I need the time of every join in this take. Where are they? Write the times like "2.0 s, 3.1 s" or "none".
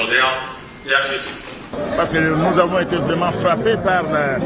1.7 s